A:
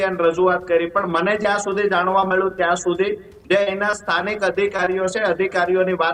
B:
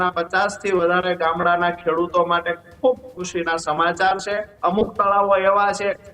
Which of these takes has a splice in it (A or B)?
B